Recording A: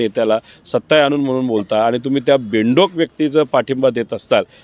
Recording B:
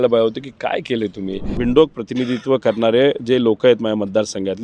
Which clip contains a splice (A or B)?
B